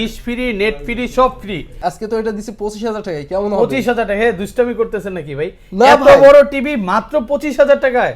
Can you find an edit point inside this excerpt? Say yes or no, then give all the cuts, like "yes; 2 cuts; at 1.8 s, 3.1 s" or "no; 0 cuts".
yes; 1 cut; at 1.8 s